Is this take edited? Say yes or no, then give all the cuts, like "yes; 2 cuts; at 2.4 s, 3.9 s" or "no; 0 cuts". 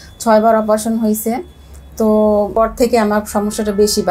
yes; 1 cut; at 2.5 s